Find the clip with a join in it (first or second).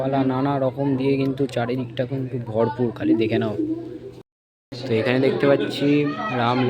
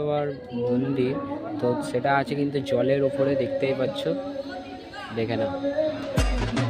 first